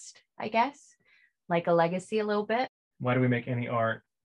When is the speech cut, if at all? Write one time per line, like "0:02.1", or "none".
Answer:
0:02.8